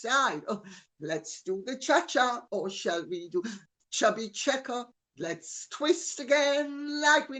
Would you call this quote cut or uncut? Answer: uncut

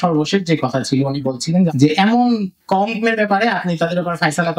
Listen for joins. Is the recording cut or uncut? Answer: cut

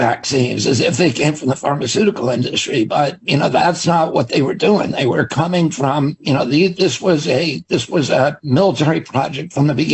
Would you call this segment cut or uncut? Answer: uncut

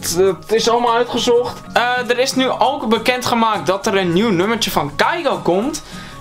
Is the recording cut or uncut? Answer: cut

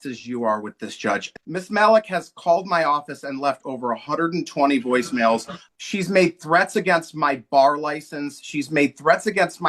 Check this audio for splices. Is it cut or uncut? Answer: cut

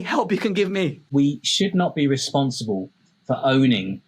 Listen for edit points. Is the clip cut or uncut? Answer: cut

